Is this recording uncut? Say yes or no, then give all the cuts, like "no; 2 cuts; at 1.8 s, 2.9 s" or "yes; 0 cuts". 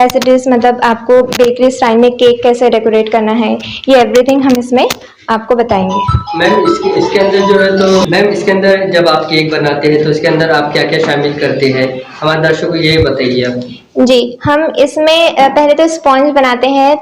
yes; 0 cuts